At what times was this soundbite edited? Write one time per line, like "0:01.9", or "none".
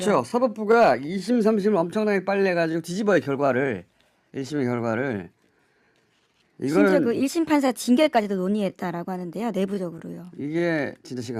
none